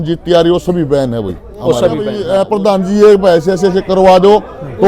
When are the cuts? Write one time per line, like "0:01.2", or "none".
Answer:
0:02.2